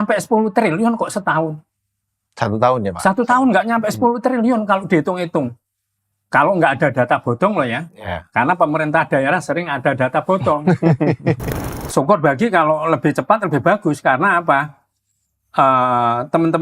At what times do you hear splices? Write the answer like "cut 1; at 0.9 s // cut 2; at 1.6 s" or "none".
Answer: cut 1; at 11.5 s